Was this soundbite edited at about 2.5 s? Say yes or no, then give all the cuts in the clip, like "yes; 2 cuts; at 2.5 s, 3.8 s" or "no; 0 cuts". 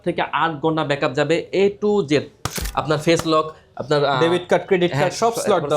yes; 1 cut; at 2.5 s